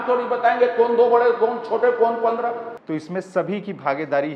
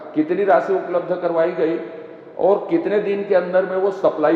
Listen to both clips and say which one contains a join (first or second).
first